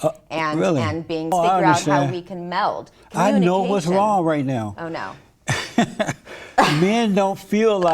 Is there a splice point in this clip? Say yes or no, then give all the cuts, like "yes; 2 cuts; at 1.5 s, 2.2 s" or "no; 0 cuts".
yes; 1 cut; at 1.3 s